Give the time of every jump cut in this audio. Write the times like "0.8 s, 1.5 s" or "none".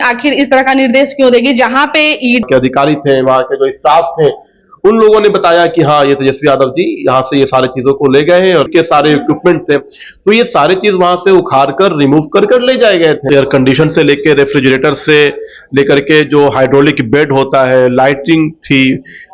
2.4 s, 8.7 s, 13.2 s